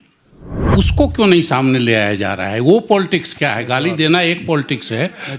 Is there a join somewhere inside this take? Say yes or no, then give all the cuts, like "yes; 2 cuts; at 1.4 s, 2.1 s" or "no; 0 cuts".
no; 0 cuts